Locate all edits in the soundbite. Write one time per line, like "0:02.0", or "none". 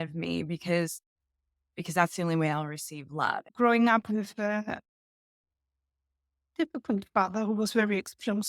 0:03.4